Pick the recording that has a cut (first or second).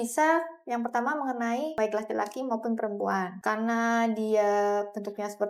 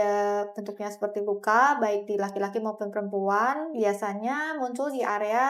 first